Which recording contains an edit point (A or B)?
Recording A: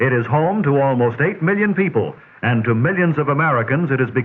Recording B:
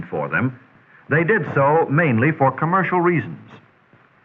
A